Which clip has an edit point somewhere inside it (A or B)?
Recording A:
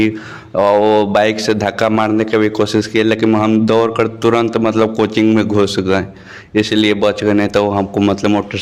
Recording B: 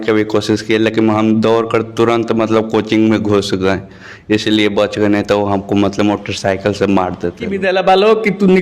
B